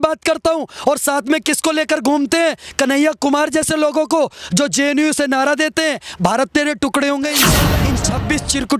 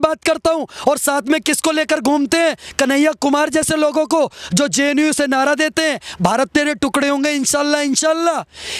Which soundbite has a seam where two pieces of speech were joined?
first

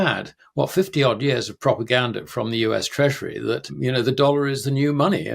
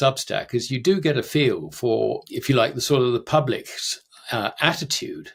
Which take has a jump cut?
first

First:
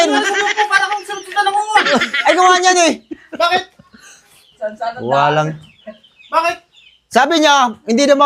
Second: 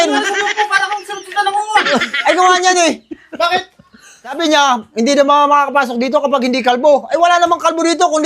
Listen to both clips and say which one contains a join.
second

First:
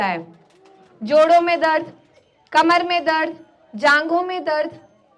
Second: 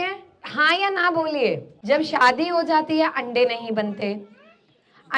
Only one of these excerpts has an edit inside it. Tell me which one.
second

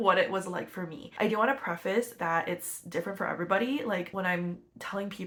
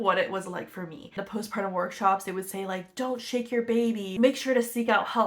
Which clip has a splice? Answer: second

